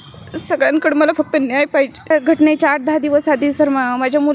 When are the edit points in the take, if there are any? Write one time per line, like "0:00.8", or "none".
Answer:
0:02.1